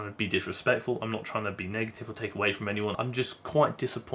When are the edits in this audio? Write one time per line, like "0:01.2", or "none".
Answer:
0:02.9